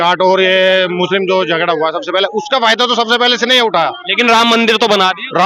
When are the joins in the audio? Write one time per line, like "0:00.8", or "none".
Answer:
none